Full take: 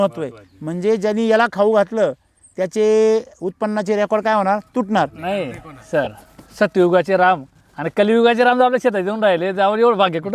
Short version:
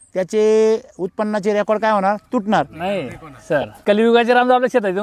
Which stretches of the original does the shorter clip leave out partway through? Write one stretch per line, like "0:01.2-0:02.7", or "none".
0:06.2-0:07.8